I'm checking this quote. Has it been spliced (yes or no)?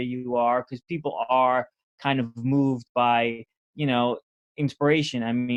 no